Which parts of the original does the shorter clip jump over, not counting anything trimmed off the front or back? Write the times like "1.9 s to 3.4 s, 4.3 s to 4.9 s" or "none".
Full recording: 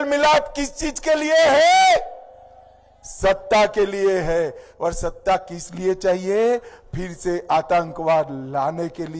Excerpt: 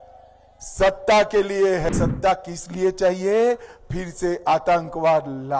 4.3 s to 4.9 s